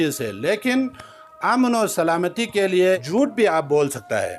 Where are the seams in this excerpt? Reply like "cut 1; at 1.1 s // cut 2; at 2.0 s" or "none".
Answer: cut 1; at 3.0 s